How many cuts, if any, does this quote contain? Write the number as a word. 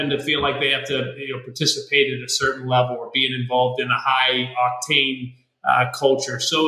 zero